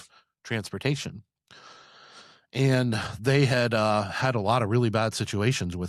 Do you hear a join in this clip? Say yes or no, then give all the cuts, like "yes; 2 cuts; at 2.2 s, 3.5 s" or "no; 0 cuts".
no; 0 cuts